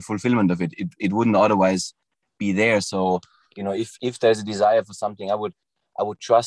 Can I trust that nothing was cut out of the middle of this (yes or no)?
yes